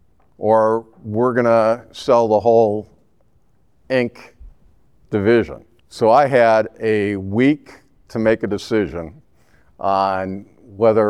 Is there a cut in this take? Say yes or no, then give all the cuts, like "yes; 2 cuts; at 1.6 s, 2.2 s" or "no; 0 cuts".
yes; 1 cut; at 5.7 s